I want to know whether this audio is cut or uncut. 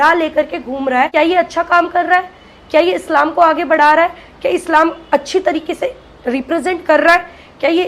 cut